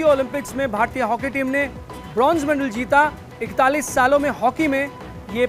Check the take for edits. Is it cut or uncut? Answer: uncut